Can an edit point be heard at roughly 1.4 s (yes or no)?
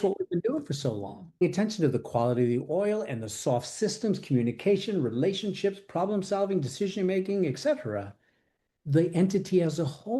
yes